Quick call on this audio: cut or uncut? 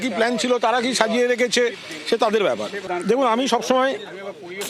cut